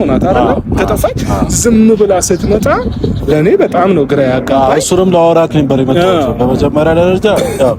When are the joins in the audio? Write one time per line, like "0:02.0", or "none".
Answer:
none